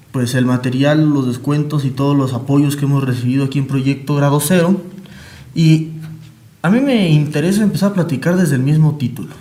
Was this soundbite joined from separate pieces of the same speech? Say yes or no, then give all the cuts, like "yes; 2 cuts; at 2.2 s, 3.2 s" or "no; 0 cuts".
no; 0 cuts